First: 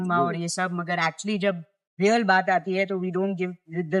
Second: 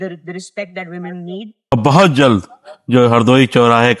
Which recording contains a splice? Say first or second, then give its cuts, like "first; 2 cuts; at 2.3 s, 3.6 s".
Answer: second; 1 cut; at 1.7 s